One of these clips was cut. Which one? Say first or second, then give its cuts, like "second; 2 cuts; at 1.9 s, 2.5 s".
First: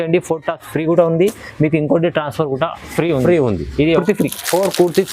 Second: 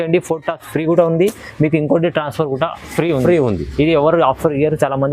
first; 1 cut; at 4.0 s